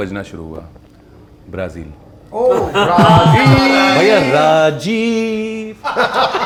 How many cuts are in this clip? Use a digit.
0